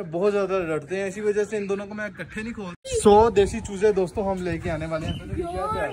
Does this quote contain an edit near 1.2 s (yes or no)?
no